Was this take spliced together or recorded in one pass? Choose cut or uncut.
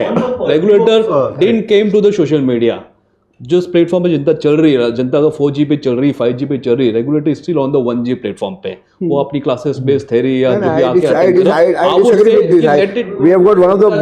uncut